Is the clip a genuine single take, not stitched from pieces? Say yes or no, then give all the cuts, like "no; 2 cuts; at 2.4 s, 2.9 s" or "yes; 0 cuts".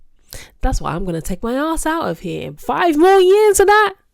no; 1 cut; at 2.5 s